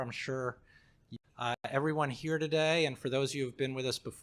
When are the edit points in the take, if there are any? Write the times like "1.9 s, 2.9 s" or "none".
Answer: 1.1 s